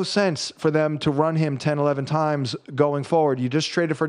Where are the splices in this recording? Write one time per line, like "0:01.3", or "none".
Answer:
none